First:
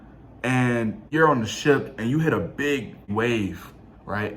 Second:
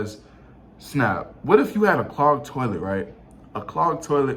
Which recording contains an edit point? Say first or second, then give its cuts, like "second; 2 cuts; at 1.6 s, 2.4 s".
first; 2 cuts; at 1.0 s, 3.1 s